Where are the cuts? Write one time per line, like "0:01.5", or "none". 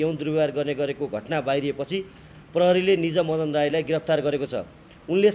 none